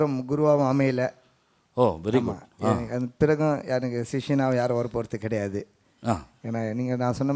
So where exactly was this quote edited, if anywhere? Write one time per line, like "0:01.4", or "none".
none